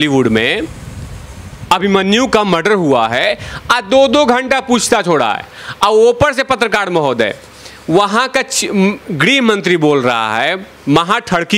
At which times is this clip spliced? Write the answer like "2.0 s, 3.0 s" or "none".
none